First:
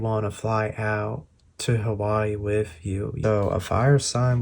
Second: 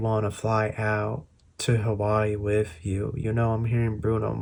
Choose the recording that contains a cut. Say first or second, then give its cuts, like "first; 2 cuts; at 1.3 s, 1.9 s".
first; 1 cut; at 3.1 s